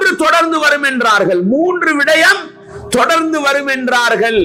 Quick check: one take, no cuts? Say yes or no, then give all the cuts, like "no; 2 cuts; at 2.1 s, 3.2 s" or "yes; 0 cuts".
yes; 0 cuts